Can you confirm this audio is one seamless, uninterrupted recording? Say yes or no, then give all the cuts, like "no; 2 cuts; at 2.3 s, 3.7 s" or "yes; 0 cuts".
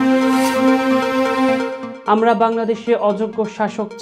no; 1 cut; at 1.8 s